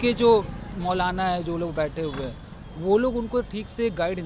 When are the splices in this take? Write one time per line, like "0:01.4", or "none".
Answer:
none